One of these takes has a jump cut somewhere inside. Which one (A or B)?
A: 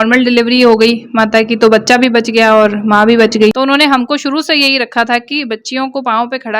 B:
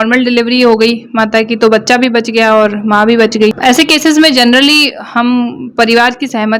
A